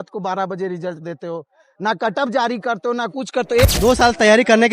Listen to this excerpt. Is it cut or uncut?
cut